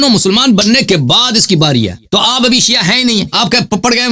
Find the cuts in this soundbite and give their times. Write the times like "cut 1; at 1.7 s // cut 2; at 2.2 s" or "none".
cut 1; at 2.1 s // cut 2; at 3.3 s